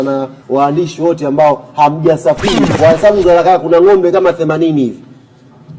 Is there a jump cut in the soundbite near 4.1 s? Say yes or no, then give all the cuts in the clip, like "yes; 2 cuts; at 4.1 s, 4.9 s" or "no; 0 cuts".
no; 1 cut; at 2.7 s